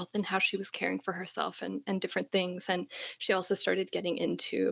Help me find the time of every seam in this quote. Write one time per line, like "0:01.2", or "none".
none

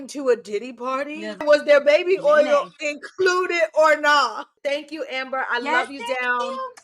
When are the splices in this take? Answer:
0:01.4
0:04.6

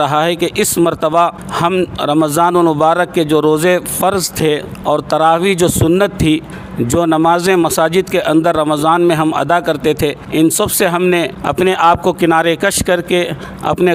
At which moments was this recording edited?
none

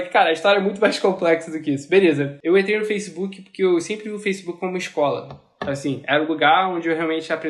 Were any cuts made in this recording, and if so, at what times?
0:02.3

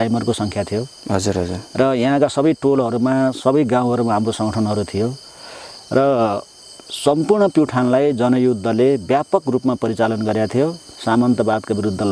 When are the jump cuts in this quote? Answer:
0:10.9

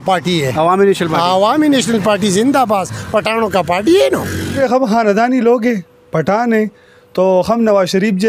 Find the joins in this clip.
0:04.6

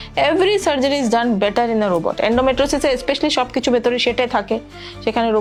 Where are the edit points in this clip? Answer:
none

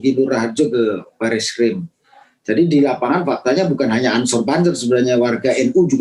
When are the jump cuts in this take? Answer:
none

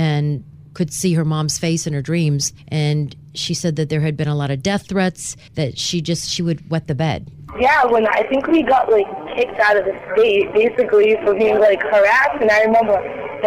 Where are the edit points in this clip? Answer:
0:02.5
0:05.4

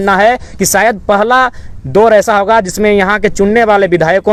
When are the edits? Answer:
none

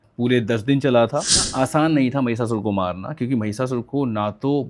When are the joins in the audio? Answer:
0:01.5

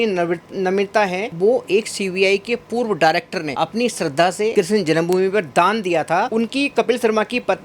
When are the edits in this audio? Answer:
0:01.3
0:03.5
0:04.5
0:06.3

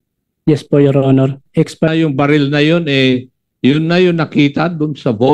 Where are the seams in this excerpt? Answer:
0:01.9

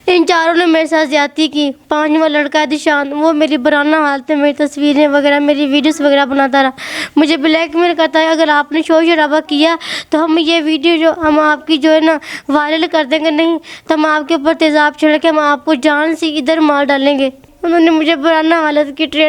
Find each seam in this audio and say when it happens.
0:17.5

